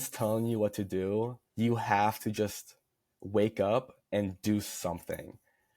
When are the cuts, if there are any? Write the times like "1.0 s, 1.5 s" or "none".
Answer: 1.4 s, 4.0 s